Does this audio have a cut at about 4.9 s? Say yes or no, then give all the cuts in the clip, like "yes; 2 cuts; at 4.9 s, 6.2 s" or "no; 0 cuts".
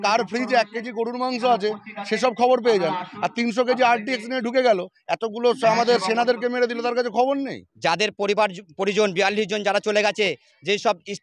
no; 1 cut; at 7.6 s